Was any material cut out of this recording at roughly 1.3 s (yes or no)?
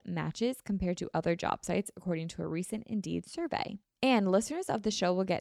no